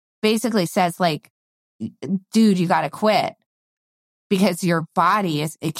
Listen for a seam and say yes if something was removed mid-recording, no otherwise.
no